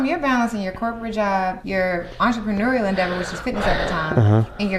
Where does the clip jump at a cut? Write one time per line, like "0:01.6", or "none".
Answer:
0:01.6

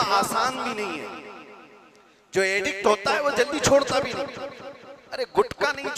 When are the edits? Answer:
none

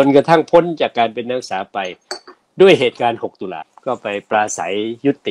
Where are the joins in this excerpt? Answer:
0:03.7

